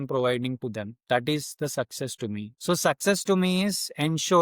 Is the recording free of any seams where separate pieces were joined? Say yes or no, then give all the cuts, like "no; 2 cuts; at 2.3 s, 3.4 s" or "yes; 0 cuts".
no; 1 cut; at 2.5 s